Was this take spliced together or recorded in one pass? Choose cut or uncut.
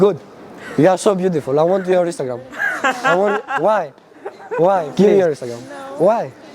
cut